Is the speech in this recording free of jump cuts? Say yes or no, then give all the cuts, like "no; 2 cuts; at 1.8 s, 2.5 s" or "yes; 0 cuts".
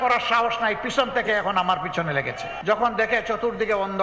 no; 1 cut; at 2.6 s